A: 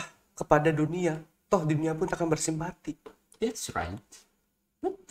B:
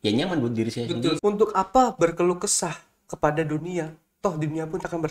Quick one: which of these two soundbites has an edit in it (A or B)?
B